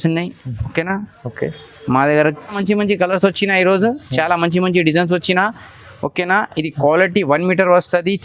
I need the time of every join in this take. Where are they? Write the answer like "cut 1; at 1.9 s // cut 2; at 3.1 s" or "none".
cut 1; at 2.6 s